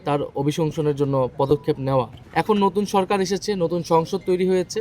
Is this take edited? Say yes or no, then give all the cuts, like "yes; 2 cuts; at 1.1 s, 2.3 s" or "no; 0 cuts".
yes; 1 cut; at 2.2 s